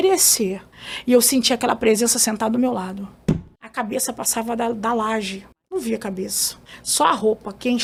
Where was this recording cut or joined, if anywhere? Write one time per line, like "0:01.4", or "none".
none